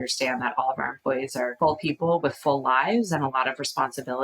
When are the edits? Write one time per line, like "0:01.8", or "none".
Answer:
0:01.5